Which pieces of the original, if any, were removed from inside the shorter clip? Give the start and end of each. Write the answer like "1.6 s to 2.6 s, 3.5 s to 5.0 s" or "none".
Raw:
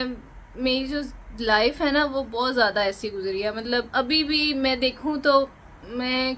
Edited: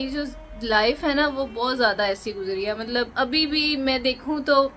none